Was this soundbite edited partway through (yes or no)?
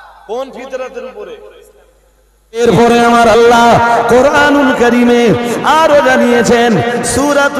yes